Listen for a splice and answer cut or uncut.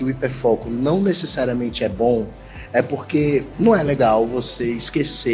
cut